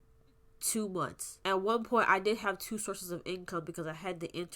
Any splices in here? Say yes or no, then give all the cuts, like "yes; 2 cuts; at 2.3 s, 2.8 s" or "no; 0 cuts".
yes; 1 cut; at 1.2 s